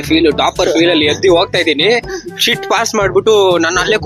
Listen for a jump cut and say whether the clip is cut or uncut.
uncut